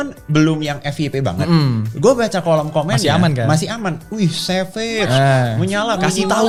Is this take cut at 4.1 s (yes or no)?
no